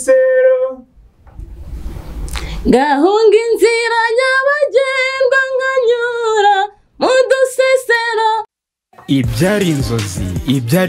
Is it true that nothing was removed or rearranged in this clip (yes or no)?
no